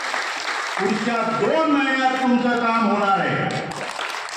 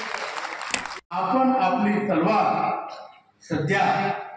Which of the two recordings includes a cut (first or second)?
second